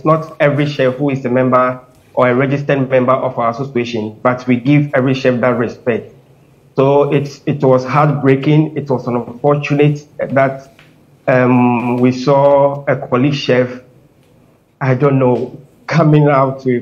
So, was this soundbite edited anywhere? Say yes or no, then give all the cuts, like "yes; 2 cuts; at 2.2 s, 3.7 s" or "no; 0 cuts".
no; 0 cuts